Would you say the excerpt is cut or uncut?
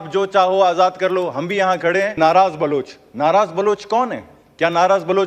cut